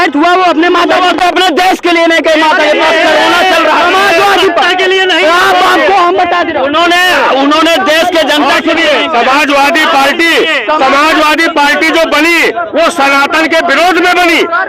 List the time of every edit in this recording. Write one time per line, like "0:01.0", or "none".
none

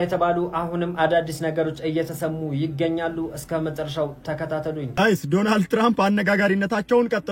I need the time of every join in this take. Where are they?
0:04.9

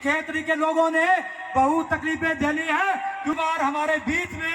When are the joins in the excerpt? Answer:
0:03.3

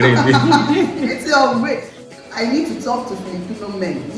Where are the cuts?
0:02.1

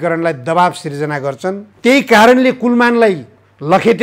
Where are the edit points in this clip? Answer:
0:01.7

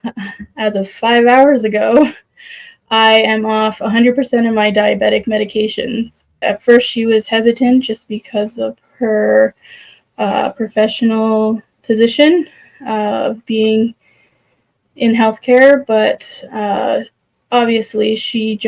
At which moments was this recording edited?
0:06.4

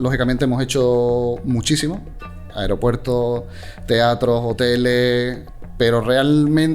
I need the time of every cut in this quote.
0:02.2
0:05.5

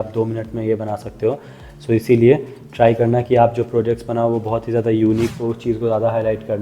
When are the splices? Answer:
0:05.3

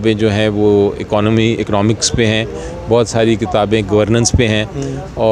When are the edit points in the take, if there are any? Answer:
none

